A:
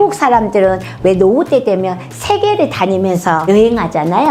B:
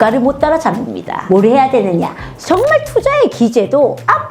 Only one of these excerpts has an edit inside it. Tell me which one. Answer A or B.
B